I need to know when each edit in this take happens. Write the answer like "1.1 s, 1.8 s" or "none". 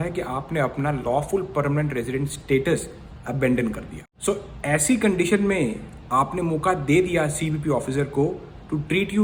none